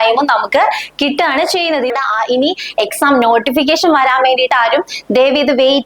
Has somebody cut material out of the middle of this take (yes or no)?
yes